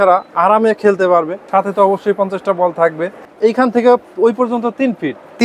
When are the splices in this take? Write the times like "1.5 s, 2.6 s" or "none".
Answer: 1.4 s, 3.2 s